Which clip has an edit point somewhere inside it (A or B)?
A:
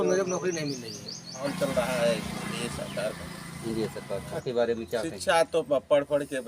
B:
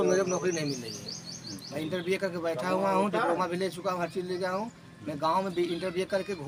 A